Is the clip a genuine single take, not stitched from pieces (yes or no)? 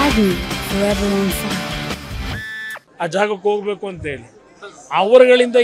no